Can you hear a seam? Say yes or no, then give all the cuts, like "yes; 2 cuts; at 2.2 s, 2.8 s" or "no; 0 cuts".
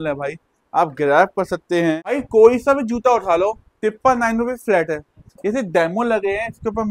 yes; 1 cut; at 2.2 s